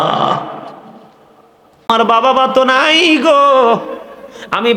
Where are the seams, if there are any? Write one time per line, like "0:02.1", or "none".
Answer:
0:01.9

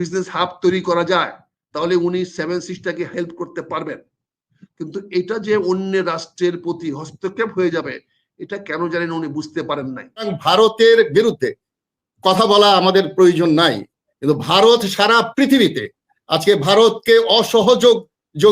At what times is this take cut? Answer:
0:10.3

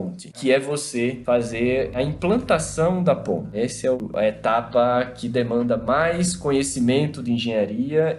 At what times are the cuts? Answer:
0:02.0
0:03.9

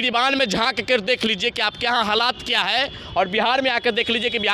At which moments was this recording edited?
none

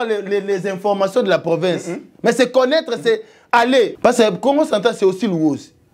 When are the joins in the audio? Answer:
0:03.9

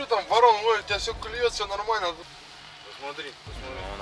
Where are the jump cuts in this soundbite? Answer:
0:02.2

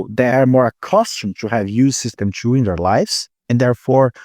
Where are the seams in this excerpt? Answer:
none

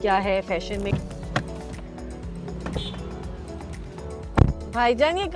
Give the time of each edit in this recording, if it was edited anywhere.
0:00.9

